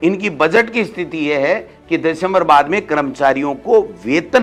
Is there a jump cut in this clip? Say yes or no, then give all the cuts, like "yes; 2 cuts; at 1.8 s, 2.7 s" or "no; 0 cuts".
no; 0 cuts